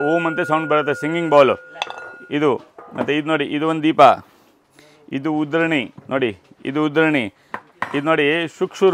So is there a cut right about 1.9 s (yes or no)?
no